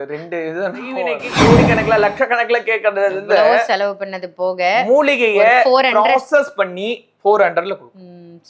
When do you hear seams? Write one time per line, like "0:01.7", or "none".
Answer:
0:01.2